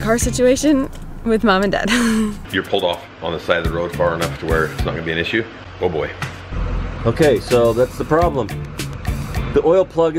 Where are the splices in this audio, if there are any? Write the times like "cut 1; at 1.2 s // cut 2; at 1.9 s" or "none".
cut 1; at 1.1 s // cut 2; at 2.4 s // cut 3; at 5.6 s // cut 4; at 6.6 s